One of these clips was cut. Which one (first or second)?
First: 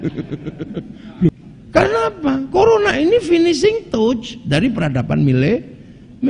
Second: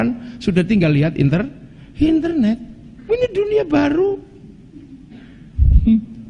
first